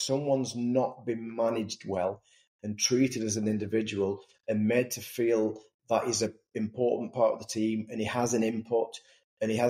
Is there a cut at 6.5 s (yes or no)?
no